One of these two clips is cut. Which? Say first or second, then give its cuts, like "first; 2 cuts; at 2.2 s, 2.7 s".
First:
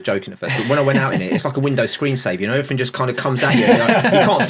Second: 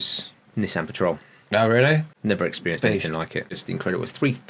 second; 1 cut; at 3.5 s